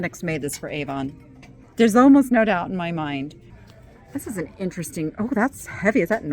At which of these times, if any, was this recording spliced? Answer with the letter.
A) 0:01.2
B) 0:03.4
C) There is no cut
B